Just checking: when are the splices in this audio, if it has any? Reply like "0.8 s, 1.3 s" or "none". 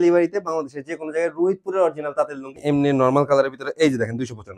2.6 s